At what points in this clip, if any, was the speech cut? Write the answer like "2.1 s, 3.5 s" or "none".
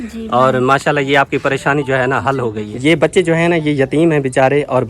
2.7 s